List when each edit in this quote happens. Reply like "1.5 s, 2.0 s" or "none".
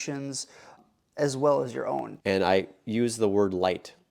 2.1 s